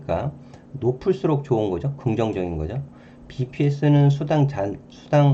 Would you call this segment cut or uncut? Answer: uncut